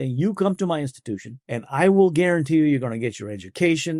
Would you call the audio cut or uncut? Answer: cut